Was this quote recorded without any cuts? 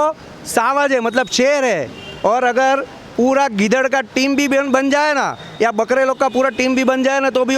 yes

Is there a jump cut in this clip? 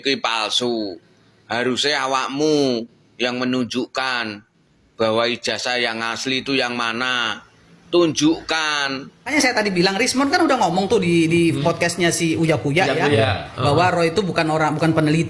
yes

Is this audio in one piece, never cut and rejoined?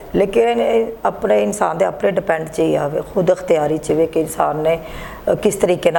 yes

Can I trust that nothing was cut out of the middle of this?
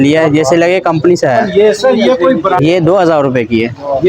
no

